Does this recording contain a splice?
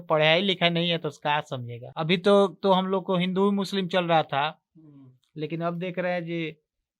yes; 1 cut; at 1.8 s

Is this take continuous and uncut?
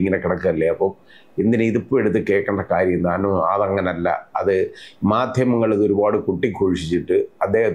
yes; 0 cuts

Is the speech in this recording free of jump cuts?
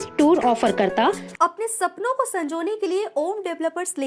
no; 1 cut; at 1.3 s

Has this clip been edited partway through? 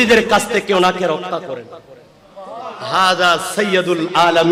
no; 0 cuts

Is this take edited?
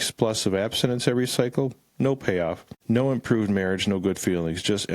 yes; 1 cut; at 2.7 s

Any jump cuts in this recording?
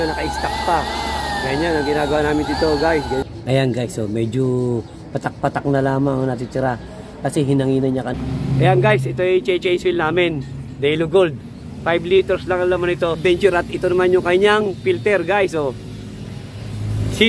yes; 3 cuts; at 3.2 s, 8.1 s, 13.2 s

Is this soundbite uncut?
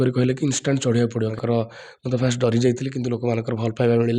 no; 1 cut; at 1.4 s

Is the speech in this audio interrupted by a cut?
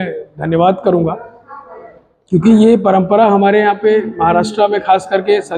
no; 0 cuts

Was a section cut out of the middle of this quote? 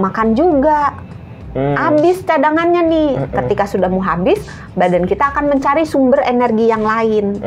no; 0 cuts

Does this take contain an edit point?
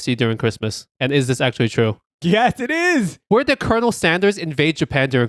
yes; 1 cut; at 3.2 s

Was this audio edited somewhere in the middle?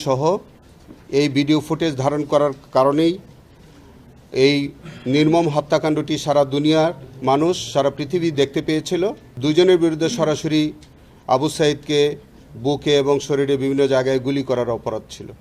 yes; 1 cut; at 9.3 s

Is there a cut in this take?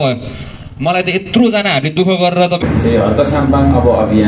yes; 1 cut; at 2.6 s

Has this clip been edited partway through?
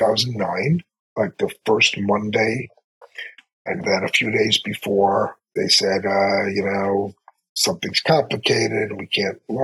no; 0 cuts

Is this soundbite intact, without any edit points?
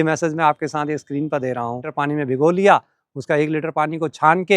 no; 1 cut; at 1.9 s

